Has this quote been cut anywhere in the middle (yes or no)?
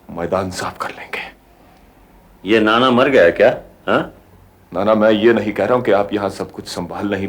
no